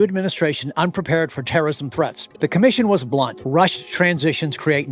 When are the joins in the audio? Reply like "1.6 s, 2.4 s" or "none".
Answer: 2.2 s, 3.4 s